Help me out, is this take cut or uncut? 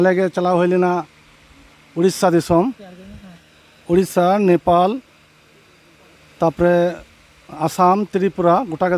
uncut